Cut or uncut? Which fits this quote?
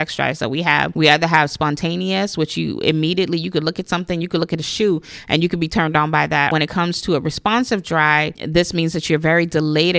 cut